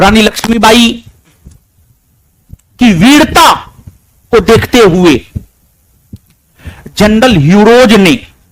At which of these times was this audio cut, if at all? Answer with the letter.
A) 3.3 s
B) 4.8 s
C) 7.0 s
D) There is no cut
D